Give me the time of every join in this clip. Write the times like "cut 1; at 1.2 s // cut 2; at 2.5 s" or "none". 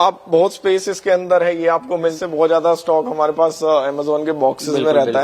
cut 1; at 2.1 s